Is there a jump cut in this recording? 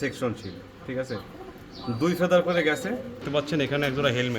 yes; 1 cut; at 3.2 s

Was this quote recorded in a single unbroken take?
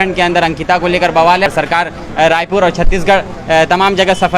no; 1 cut; at 1.5 s

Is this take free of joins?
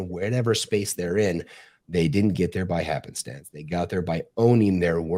yes; 0 cuts

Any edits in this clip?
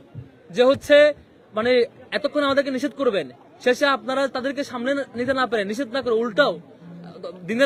no; 0 cuts

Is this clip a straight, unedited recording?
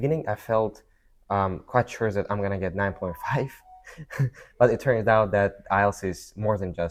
yes; 0 cuts

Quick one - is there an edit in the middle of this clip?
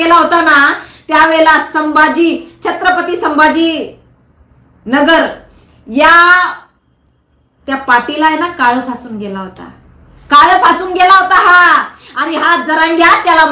no; 0 cuts

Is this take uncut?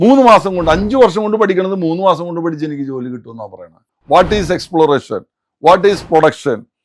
no; 1 cut; at 3.9 s

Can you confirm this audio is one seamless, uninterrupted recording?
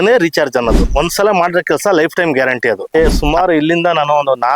no; 2 cuts; at 0.9 s, 2.9 s

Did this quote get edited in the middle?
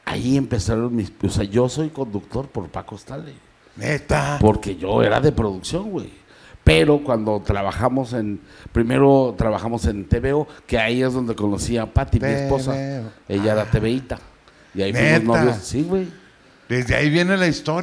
no; 0 cuts

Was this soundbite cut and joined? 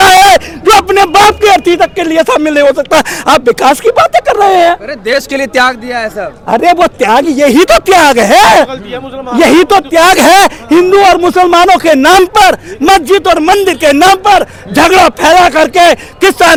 no; 0 cuts

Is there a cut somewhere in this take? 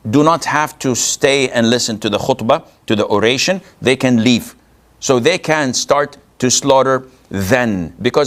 no; 0 cuts

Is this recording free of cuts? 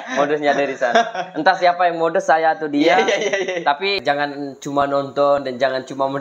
no; 1 cut; at 4.0 s

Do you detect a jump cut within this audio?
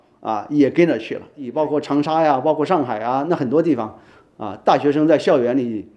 yes; 1 cut; at 1.4 s

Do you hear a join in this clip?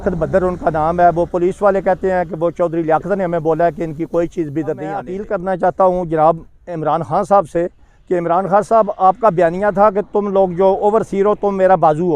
yes; 1 cut; at 5.2 s

